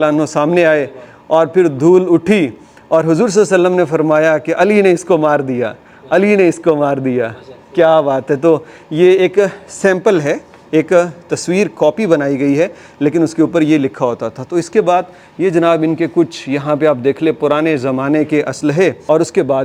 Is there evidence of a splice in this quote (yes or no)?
no